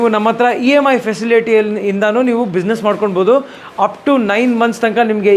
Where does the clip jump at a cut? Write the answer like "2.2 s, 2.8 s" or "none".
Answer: none

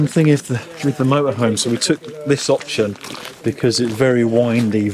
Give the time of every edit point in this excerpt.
none

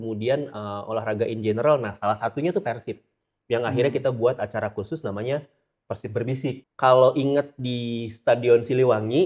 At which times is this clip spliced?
6.7 s

